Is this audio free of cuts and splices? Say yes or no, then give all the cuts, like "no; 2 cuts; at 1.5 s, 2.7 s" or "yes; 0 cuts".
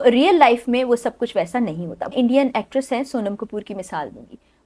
no; 1 cut; at 2.1 s